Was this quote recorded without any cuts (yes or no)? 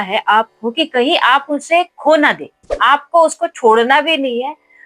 no